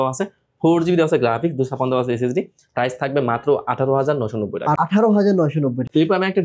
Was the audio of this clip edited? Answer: no; 0 cuts

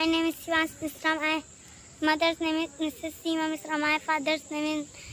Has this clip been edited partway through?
no; 0 cuts

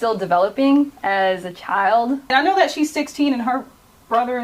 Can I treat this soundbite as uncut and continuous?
no; 1 cut; at 2.3 s

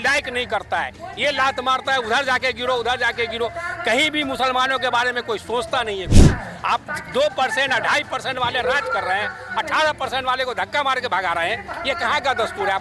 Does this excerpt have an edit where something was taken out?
no; 0 cuts

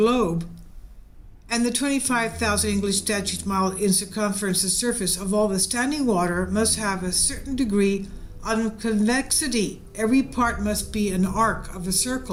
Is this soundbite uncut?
yes; 0 cuts

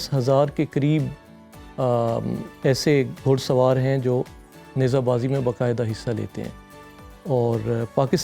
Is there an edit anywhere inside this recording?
no; 0 cuts

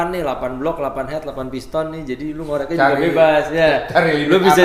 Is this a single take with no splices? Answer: yes; 0 cuts

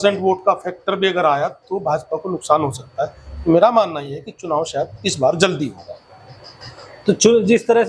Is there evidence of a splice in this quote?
no; 0 cuts

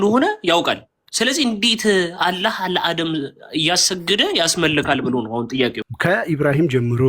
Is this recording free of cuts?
no; 1 cut; at 5.9 s

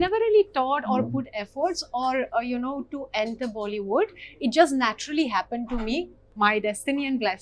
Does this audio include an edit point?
yes; 1 cut; at 6.2 s

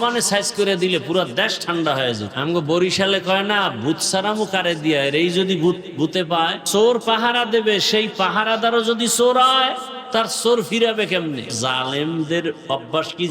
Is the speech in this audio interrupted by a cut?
yes; 4 cuts; at 2.3 s, 6.6 s, 9.9 s, 11.6 s

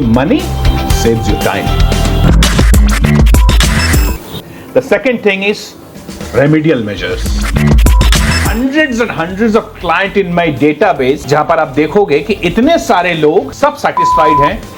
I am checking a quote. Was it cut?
no; 0 cuts

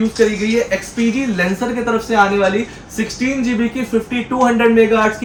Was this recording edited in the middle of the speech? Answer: no; 0 cuts

